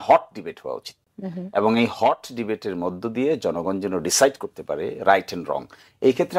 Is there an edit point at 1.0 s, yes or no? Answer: no